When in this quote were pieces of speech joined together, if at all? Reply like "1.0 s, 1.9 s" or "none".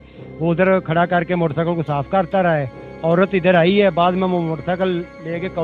none